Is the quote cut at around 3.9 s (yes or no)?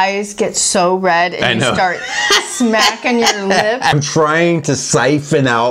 yes